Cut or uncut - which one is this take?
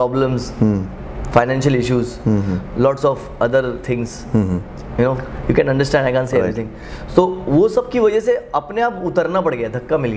uncut